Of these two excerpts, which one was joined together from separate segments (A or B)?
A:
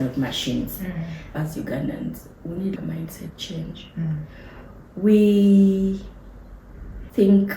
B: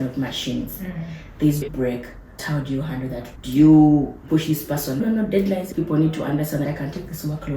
A